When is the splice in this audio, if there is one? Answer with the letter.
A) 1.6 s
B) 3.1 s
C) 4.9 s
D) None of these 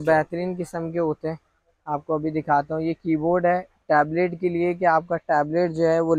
D